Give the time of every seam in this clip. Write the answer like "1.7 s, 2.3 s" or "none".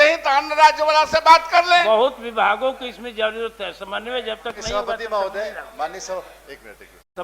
none